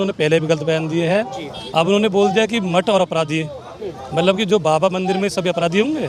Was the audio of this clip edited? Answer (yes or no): no